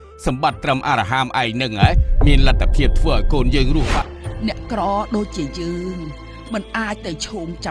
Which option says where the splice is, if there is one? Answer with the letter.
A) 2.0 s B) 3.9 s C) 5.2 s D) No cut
B